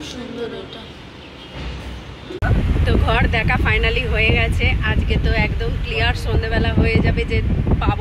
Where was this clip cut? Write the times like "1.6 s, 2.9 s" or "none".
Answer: 2.4 s